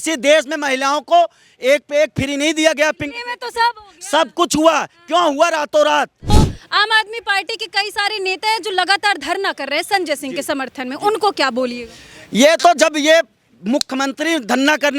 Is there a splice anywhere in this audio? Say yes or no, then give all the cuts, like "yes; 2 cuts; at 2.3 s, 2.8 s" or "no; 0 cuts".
yes; 1 cut; at 6.2 s